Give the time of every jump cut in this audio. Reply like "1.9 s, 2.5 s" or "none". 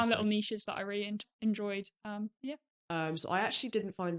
2.7 s